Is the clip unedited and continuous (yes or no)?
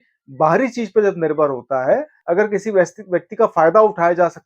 no